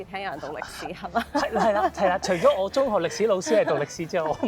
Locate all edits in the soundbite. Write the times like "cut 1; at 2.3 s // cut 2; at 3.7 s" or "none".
none